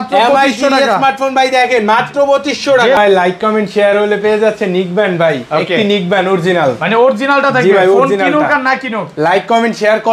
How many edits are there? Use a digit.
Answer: 1